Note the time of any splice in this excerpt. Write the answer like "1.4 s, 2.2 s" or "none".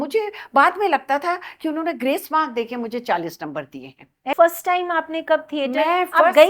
4.3 s